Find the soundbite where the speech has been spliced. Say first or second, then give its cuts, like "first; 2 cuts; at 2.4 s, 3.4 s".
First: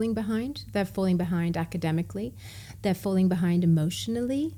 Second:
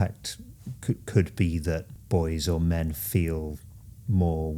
second; 1 cut; at 1.9 s